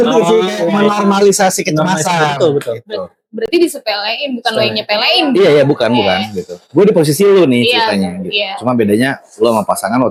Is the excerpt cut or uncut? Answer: uncut